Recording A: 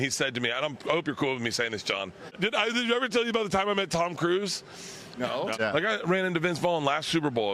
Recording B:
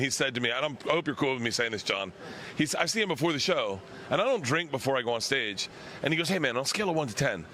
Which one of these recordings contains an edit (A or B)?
A